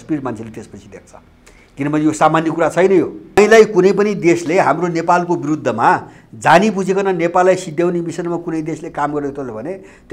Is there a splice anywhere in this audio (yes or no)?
yes